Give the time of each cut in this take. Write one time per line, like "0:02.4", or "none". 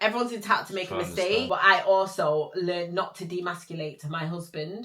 0:01.5